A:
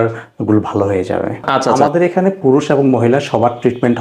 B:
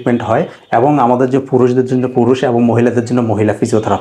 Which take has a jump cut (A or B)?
A